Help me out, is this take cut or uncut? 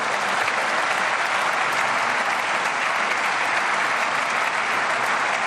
uncut